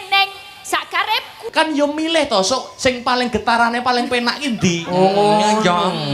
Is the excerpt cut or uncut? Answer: cut